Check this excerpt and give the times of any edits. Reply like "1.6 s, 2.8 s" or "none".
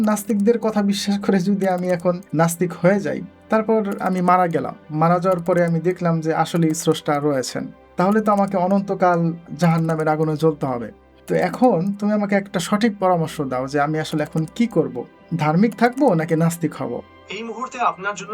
17.2 s

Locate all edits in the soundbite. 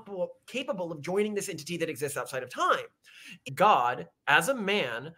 3.5 s

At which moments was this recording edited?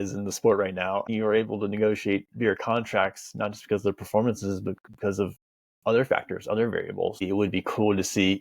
1.1 s, 7.2 s

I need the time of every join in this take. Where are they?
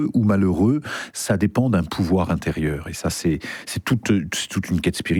none

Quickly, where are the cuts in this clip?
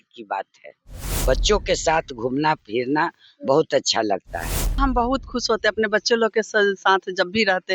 1.1 s, 4.8 s

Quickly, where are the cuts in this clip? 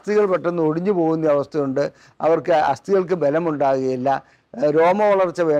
none

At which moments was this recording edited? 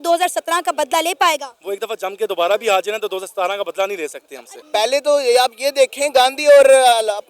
4.5 s

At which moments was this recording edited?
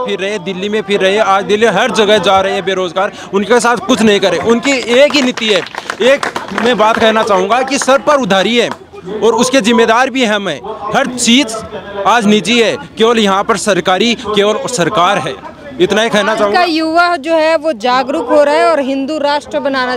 none

